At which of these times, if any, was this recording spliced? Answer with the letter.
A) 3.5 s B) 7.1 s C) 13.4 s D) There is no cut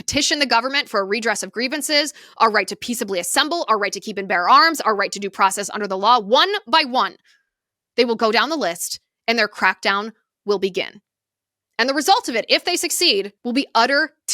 C